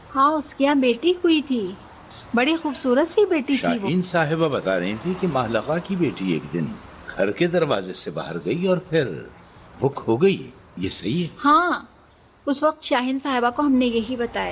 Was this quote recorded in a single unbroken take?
no; 1 cut; at 13.2 s

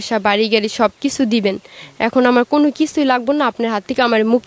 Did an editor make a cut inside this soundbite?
no; 0 cuts

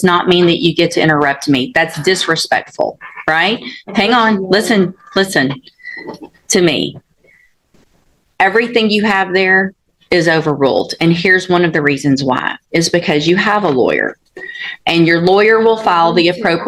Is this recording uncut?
yes; 0 cuts

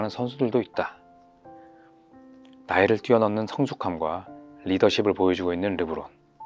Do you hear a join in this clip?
yes; 2 cuts; at 1.0 s, 2.6 s

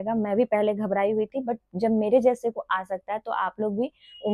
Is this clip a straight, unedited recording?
yes; 0 cuts

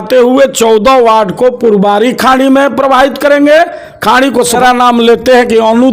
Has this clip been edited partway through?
yes; 1 cut; at 4.6 s

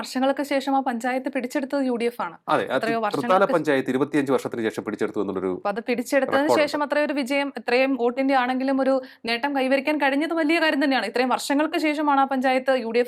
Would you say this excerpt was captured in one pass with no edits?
yes; 0 cuts

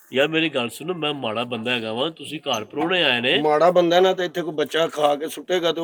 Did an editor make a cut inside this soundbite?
no; 0 cuts

